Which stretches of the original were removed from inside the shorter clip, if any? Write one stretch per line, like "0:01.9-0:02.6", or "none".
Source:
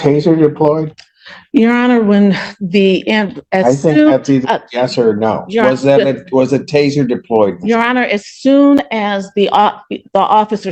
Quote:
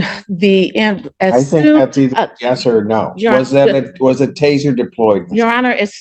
none